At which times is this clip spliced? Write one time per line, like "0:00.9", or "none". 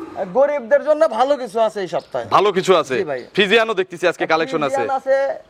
none